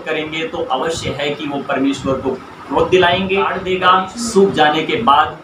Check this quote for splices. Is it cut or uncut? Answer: cut